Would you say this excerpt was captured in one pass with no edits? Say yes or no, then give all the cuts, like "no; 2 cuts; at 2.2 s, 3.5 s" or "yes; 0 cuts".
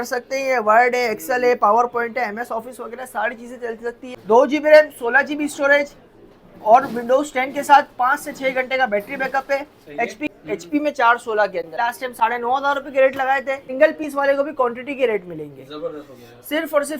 no; 4 cuts; at 4.0 s, 10.2 s, 11.7 s, 13.7 s